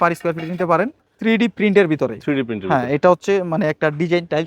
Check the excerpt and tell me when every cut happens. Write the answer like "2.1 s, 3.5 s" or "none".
1.1 s